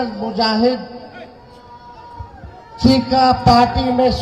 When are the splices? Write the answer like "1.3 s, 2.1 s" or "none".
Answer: none

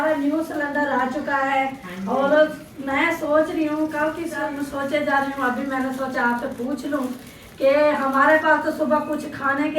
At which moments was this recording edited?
4.4 s

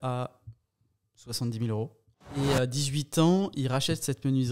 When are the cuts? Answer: 2.1 s

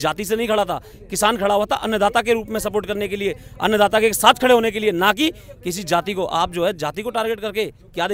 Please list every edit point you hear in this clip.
none

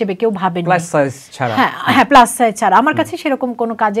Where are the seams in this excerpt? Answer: none

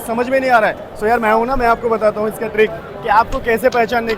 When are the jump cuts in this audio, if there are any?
none

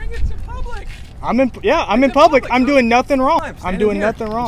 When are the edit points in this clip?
3.4 s

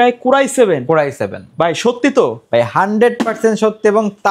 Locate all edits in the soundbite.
none

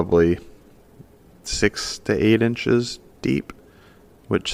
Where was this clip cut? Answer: none

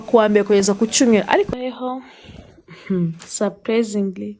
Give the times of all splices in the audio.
1.5 s

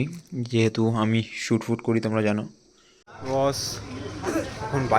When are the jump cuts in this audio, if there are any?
3.1 s

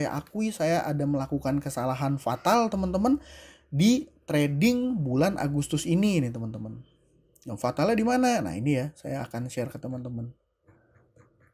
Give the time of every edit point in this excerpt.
none

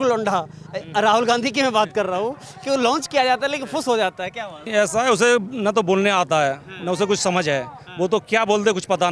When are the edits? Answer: 4.7 s

